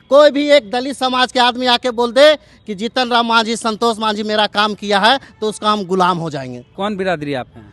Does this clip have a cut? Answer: yes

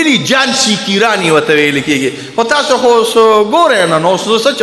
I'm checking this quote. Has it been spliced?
no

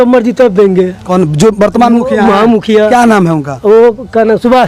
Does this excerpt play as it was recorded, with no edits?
yes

